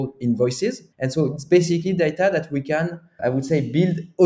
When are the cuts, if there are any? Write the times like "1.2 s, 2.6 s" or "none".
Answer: 0.9 s, 3.1 s